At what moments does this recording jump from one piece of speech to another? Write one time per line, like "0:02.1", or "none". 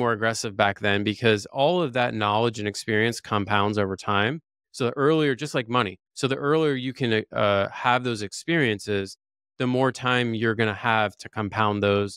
none